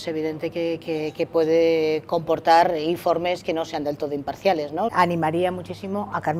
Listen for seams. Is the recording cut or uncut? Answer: cut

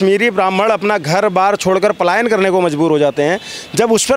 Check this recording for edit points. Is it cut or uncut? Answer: uncut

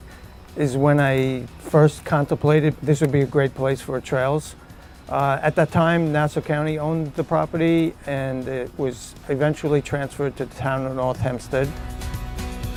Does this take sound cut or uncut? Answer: uncut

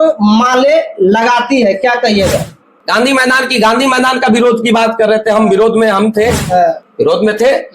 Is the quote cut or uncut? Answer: cut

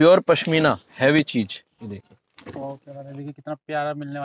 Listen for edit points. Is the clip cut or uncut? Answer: uncut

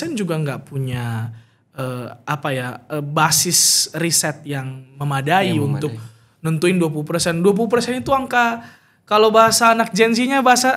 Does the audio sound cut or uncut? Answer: uncut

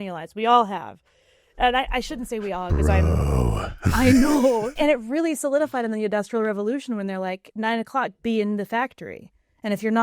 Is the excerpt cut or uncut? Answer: cut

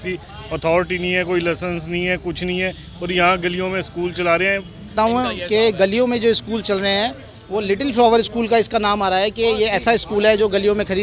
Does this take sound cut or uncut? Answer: cut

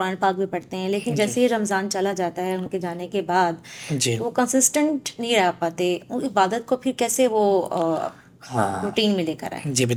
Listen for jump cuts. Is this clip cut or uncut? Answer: uncut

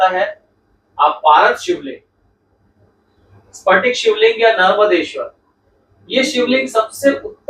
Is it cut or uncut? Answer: uncut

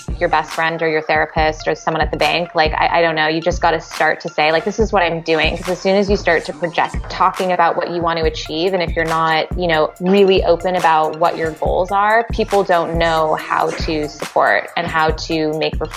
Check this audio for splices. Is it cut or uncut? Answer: cut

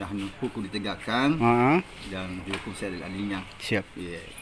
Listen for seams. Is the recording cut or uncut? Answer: uncut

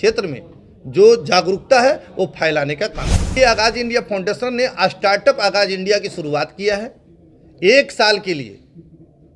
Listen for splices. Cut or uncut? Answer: cut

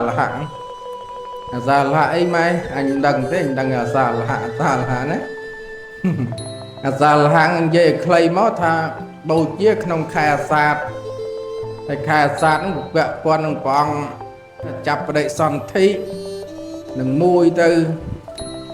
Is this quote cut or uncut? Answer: cut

